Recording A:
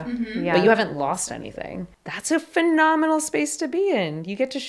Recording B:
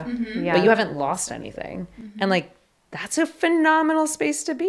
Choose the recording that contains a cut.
A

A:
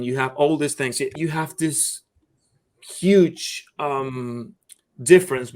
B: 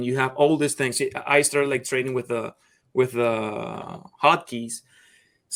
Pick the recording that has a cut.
A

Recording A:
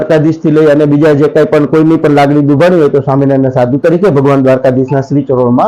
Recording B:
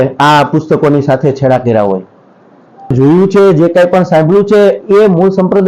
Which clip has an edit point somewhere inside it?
B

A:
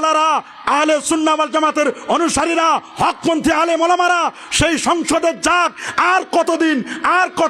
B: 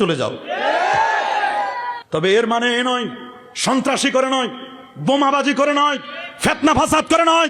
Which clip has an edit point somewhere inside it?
B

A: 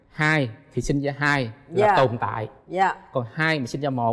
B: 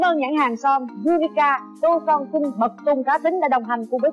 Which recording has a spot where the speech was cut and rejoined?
B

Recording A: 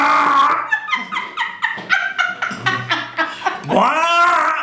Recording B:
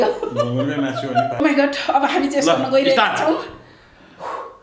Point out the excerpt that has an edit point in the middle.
B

